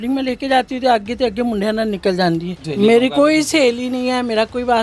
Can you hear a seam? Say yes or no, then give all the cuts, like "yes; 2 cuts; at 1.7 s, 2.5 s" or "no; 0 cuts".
yes; 1 cut; at 2.6 s